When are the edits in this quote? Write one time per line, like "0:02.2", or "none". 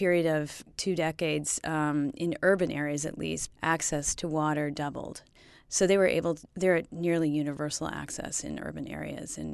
none